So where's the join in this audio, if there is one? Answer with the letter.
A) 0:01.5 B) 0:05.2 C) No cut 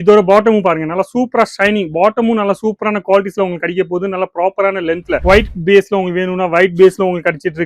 B